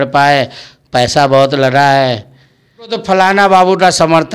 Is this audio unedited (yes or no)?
no